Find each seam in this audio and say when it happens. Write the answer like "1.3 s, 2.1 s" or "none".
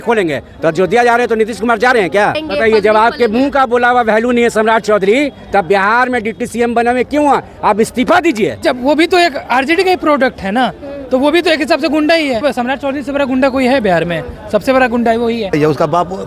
2.4 s, 8.6 s, 12.4 s, 15.5 s